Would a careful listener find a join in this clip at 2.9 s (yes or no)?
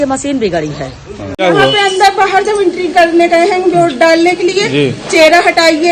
no